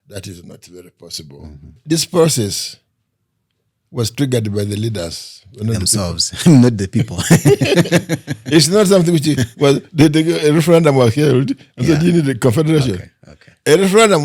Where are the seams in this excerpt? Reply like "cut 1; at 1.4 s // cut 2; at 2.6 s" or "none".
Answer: cut 1; at 1.8 s